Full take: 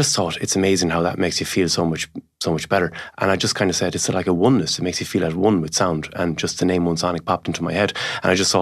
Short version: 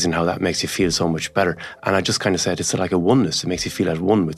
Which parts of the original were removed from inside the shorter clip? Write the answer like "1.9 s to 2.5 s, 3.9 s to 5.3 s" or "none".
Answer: 2.0 s to 2.6 s